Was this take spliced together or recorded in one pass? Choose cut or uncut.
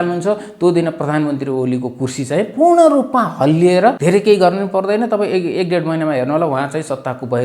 cut